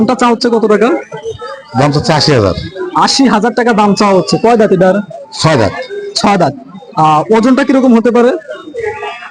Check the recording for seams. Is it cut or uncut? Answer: uncut